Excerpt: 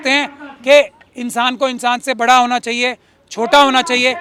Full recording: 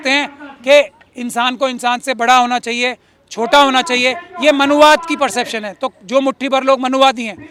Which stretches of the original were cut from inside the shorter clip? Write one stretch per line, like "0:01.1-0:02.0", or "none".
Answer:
none